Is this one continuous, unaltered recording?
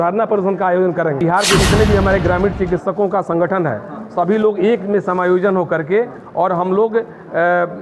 no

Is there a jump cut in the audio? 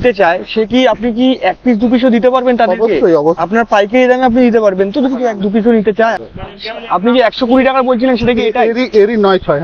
yes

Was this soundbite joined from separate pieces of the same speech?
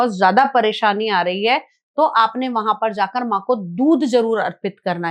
no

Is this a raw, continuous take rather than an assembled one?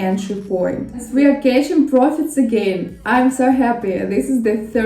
no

